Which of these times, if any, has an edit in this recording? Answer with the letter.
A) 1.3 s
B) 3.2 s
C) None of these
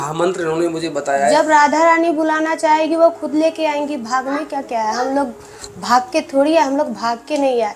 A